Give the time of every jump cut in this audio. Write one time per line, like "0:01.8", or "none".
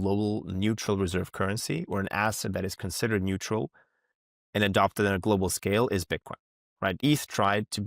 0:07.0